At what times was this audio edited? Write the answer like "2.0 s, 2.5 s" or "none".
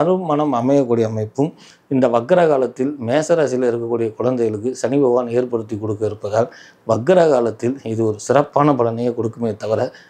1.7 s